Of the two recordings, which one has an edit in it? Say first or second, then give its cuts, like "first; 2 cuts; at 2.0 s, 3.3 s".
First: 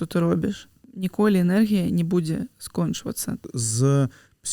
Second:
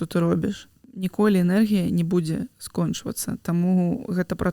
first; 1 cut; at 3.4 s